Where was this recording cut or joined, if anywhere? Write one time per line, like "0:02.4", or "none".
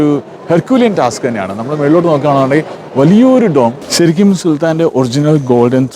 0:03.8